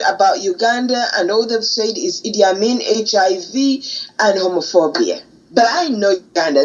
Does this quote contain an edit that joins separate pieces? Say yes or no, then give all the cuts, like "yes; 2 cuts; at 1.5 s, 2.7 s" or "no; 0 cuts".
yes; 1 cut; at 5.3 s